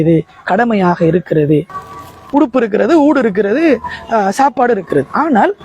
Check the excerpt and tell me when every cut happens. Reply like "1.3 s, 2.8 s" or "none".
1.7 s

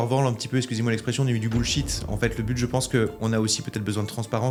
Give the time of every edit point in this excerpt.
none

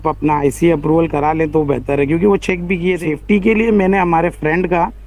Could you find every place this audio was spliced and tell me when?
3.0 s

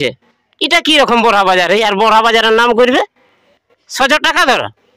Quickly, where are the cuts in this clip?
none

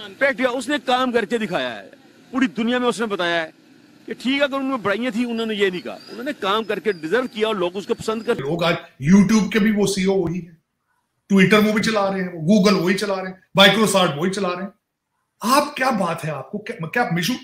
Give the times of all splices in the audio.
8.4 s

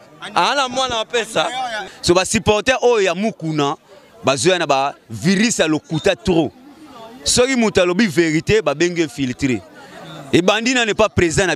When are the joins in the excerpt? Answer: 1.9 s

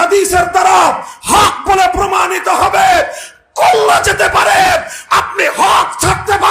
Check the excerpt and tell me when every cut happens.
none

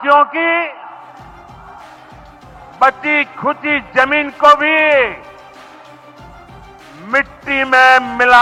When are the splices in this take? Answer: none

